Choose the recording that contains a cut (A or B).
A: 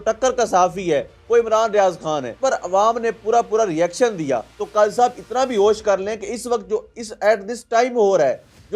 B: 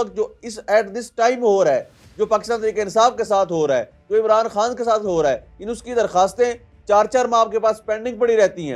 A